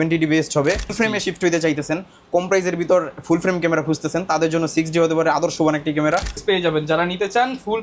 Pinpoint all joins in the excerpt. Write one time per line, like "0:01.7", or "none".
0:00.9
0:06.4